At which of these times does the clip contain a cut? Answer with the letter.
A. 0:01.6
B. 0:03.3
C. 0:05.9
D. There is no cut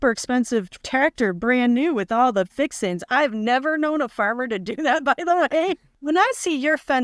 C